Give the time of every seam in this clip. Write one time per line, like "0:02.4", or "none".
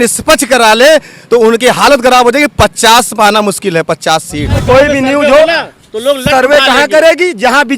0:04.6